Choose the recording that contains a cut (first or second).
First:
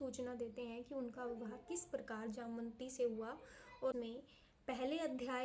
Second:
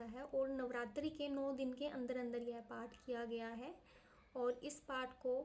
first